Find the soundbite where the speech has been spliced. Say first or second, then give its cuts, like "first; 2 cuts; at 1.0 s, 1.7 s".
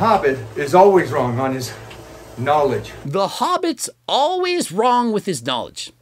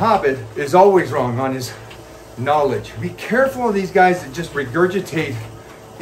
second; 2 cuts; at 2.9 s, 4.4 s